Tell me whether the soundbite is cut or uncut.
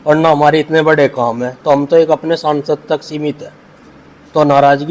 uncut